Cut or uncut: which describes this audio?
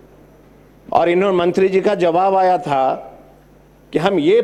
uncut